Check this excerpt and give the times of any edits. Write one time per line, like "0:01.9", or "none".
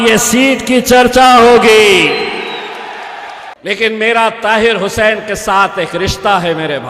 0:03.5